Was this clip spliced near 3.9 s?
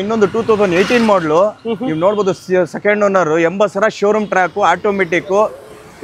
no; 0 cuts

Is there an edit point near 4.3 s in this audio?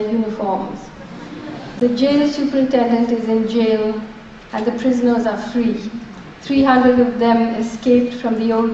no; 1 cut; at 5.6 s

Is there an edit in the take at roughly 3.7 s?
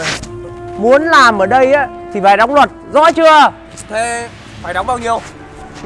yes; 1 cut; at 3.7 s

